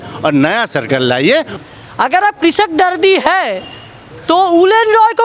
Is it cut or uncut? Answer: cut